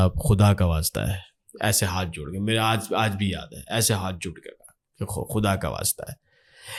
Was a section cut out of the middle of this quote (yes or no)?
no